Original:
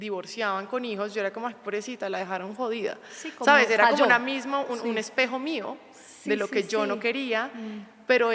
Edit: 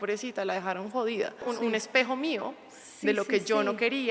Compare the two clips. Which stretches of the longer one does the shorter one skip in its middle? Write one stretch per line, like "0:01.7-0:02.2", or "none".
0:03.1-0:04.7